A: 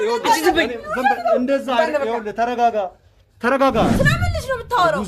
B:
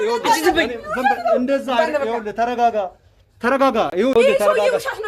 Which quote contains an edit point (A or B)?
A